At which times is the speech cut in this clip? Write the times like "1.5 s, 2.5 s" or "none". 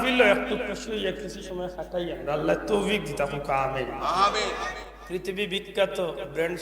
4.9 s